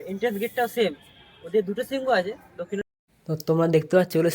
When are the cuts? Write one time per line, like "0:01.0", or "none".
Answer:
0:02.9